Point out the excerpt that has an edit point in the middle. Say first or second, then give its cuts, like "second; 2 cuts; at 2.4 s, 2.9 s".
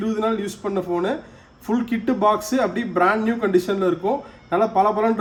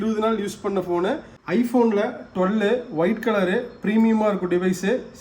second; 1 cut; at 1.3 s